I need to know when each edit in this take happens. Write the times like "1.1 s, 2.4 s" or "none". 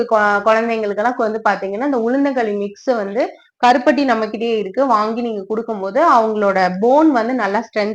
none